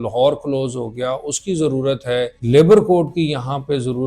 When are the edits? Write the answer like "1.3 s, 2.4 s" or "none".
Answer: 2.4 s